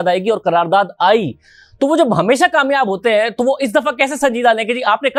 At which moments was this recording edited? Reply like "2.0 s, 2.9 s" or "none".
none